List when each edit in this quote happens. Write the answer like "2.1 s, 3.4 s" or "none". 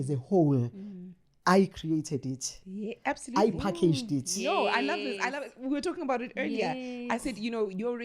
none